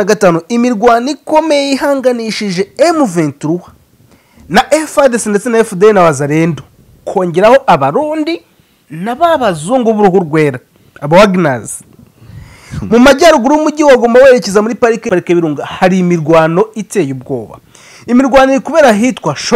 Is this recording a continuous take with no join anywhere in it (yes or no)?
no